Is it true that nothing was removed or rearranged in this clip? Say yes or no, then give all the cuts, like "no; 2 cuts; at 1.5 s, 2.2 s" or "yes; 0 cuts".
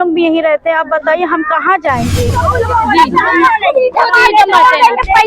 no; 1 cut; at 2.3 s